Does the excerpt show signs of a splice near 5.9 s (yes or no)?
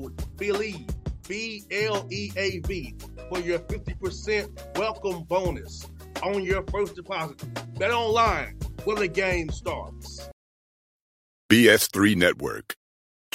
no